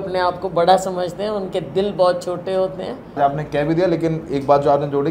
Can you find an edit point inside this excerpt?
yes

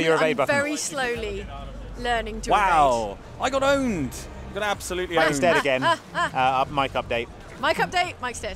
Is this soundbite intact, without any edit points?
yes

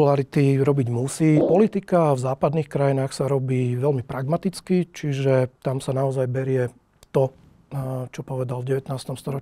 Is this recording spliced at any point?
yes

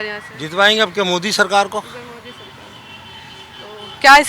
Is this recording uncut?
yes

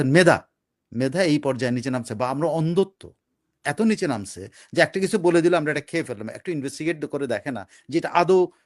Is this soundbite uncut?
yes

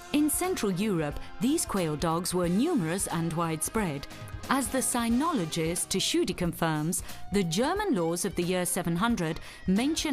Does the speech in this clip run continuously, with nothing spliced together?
no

